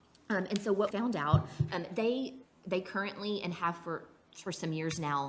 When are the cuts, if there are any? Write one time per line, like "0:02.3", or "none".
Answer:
0:00.9